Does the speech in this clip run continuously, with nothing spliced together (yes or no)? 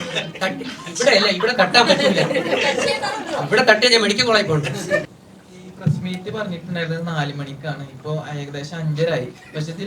no